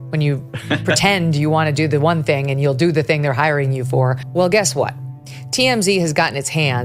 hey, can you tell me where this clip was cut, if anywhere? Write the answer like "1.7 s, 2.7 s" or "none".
4.2 s